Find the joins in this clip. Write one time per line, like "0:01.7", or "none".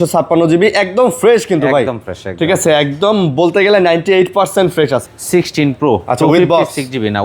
0:05.0